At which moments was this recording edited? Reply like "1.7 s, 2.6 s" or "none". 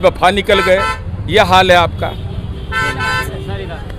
none

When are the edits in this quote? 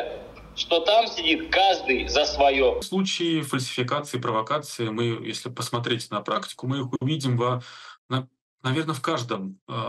2.8 s

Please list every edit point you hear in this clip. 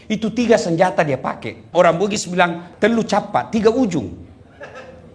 1.7 s, 2.6 s

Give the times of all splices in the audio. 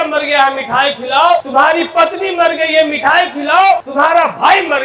1.5 s, 3.9 s

